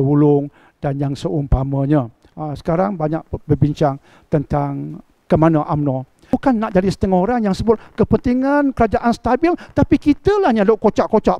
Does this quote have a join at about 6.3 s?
yes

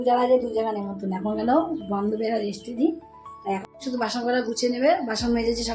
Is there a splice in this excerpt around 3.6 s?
yes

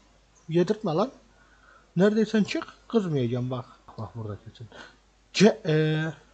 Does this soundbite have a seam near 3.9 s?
yes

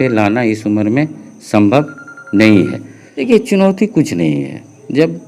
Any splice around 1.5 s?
no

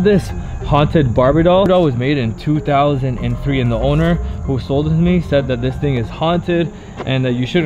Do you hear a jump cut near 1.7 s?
yes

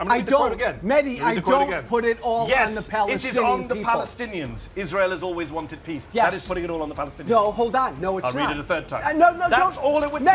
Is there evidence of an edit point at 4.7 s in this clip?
no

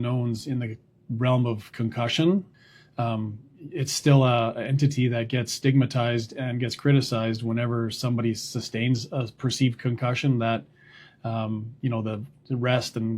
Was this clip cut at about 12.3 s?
no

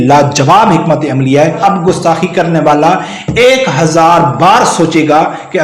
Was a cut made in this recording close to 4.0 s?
no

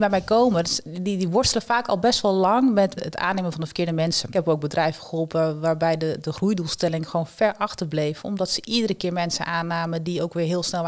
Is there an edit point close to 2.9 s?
yes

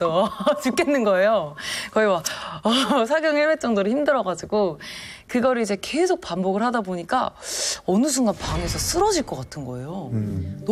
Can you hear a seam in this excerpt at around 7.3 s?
no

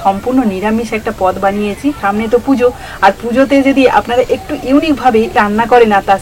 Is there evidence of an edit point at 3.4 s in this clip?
no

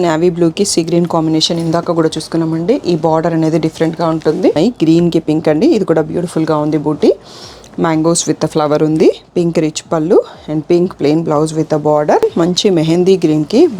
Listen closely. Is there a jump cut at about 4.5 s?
yes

